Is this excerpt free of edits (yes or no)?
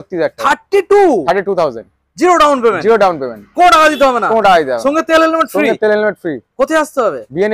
yes